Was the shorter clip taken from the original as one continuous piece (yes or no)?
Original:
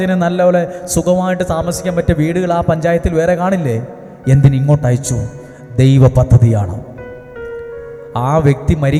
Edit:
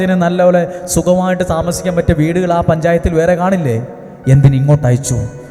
yes